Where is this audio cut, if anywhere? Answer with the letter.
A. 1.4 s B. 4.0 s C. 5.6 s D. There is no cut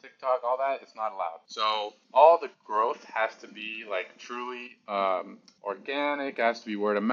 D